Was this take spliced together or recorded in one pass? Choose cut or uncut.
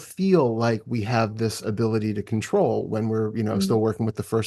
uncut